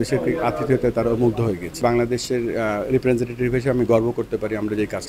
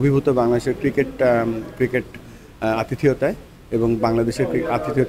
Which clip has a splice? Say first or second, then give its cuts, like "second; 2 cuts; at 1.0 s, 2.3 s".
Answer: first; 1 cut; at 1.8 s